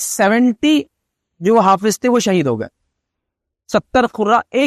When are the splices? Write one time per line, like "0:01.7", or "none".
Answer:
none